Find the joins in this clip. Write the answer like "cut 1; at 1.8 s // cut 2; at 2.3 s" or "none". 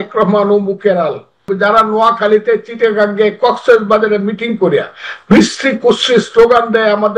cut 1; at 1.4 s